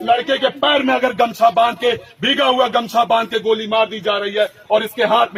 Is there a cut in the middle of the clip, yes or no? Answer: no